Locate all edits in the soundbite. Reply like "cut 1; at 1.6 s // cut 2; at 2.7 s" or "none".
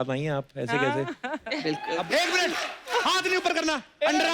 cut 1; at 2.0 s